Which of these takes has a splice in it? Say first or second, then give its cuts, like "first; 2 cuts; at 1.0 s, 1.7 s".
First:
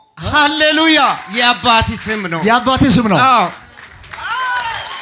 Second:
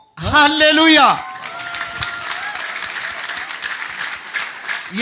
first; 1 cut; at 1.2 s